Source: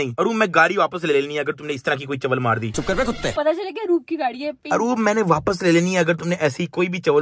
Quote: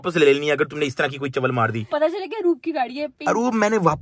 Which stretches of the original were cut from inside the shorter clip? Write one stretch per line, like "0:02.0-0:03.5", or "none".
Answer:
0:02.7-0:03.3